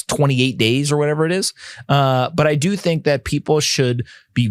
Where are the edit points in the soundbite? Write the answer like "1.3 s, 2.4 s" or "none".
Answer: none